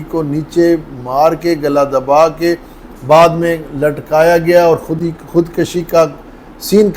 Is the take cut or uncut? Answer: uncut